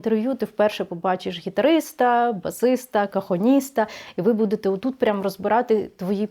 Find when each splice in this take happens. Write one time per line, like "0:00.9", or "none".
none